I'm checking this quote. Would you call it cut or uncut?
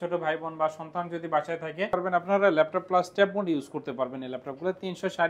cut